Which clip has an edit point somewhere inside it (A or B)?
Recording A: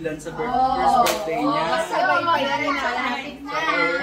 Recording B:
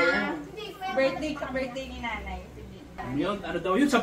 B